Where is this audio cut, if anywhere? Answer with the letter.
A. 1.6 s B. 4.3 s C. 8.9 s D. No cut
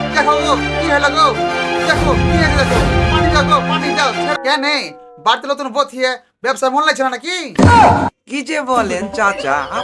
B